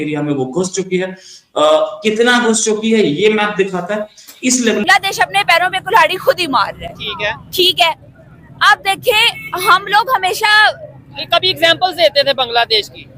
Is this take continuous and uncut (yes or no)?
no